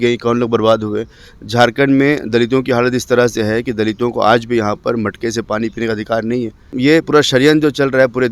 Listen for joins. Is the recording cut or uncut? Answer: cut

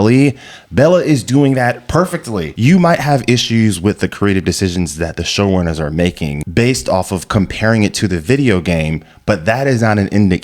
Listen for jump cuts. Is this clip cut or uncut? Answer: cut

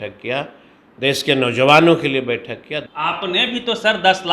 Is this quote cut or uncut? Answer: cut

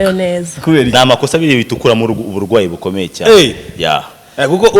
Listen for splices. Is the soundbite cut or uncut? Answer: cut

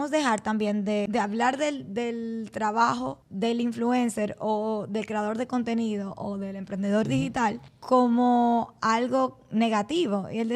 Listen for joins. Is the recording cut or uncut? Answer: cut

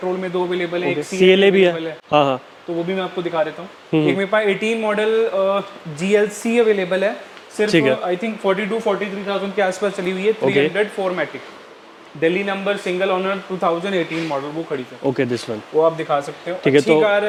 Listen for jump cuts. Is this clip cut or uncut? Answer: uncut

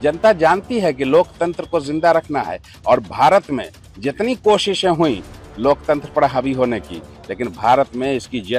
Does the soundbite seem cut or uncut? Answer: uncut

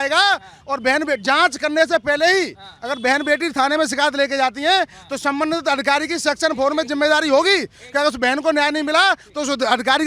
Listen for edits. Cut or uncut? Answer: uncut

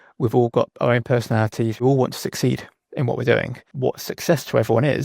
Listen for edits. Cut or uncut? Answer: cut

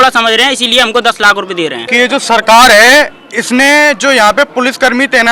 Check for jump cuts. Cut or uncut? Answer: cut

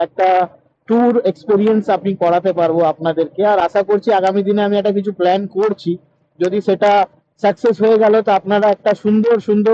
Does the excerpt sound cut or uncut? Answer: uncut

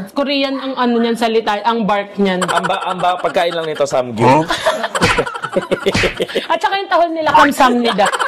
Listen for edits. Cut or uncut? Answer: uncut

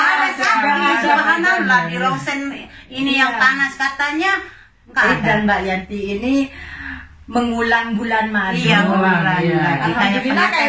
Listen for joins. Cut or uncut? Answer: cut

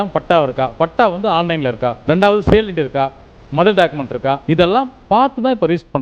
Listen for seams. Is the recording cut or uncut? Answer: cut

